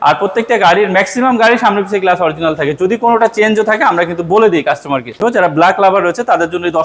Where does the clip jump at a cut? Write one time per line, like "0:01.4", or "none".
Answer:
0:05.2